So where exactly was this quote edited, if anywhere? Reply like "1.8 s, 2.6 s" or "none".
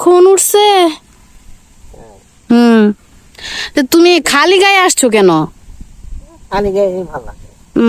none